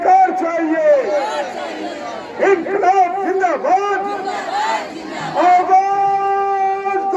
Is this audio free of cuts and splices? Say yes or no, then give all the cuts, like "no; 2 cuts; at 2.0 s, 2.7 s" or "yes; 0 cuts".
yes; 0 cuts